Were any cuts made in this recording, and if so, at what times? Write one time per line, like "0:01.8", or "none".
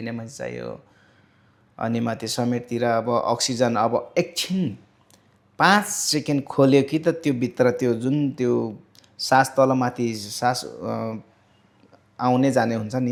none